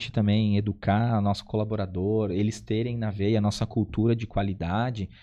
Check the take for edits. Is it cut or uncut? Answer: uncut